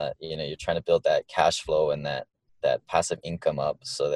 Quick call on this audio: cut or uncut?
uncut